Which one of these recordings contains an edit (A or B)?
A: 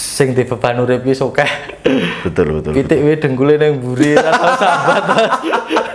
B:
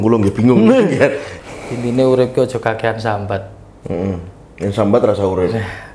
B